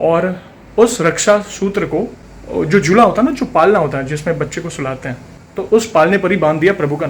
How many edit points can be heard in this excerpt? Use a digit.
1